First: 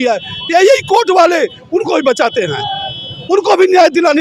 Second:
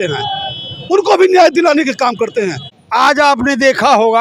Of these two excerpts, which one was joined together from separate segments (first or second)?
second